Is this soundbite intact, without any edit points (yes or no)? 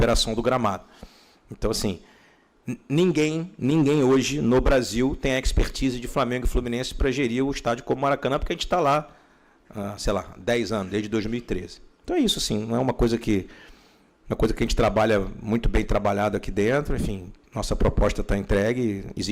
yes